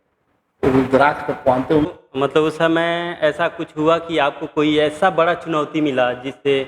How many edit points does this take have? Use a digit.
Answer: 1